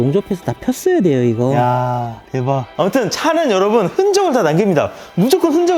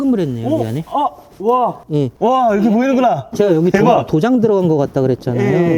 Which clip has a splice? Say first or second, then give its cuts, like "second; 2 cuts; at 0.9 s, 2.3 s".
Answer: first; 1 cut; at 2.7 s